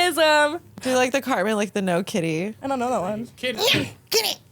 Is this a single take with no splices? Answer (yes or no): no